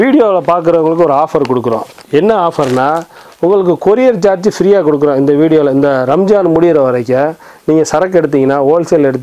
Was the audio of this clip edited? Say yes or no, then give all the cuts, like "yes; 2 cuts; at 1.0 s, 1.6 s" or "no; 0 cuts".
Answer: yes; 1 cut; at 3.2 s